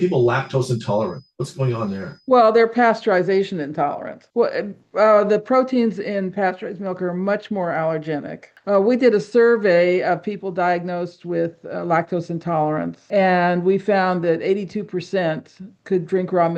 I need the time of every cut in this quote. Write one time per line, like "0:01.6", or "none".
none